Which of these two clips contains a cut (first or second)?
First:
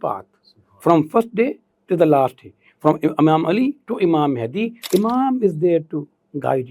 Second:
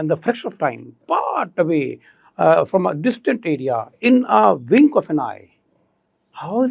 first